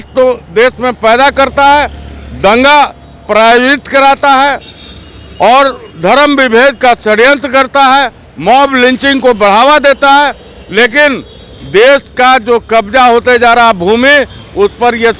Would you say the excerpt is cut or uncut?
uncut